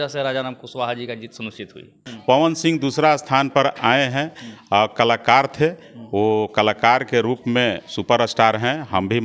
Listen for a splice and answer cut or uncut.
cut